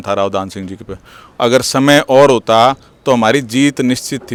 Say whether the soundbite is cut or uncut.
uncut